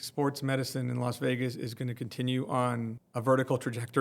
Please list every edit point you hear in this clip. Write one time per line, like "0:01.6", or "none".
0:03.0